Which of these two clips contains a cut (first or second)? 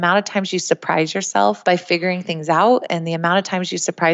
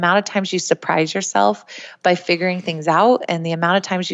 first